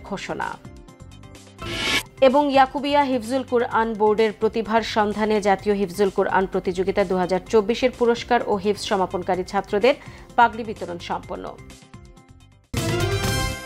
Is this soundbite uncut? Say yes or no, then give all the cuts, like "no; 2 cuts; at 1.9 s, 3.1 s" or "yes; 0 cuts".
no; 1 cut; at 12.7 s